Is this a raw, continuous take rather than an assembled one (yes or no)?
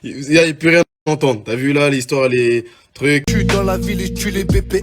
no